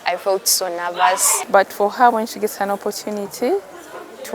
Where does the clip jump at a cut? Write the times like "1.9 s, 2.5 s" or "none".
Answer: 1.4 s